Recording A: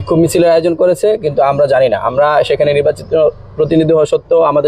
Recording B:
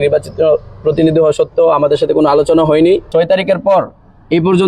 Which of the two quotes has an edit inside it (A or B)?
B